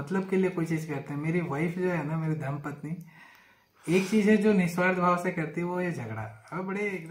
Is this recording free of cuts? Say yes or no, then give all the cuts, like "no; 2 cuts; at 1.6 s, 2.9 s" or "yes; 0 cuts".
yes; 0 cuts